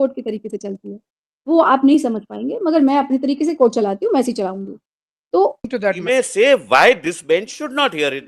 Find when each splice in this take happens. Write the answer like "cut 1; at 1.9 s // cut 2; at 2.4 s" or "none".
cut 1; at 5.7 s